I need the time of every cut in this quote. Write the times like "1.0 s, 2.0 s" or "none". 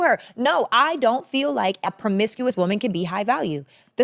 2.5 s